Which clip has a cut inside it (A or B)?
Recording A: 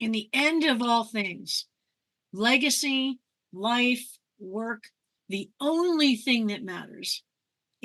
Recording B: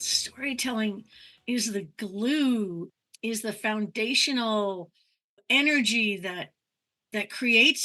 B